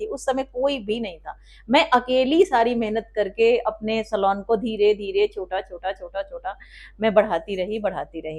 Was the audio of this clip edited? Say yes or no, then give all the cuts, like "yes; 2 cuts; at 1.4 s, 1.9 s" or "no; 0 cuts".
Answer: no; 0 cuts